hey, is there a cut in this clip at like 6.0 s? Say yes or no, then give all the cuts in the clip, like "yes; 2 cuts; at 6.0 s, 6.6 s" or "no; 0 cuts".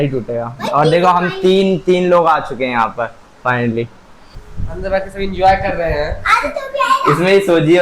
no; 1 cut; at 4.3 s